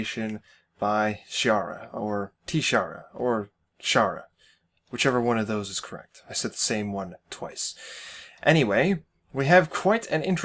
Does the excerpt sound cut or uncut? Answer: cut